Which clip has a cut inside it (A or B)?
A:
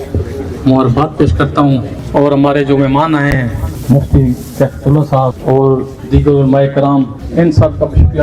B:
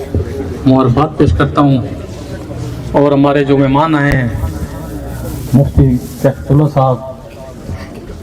A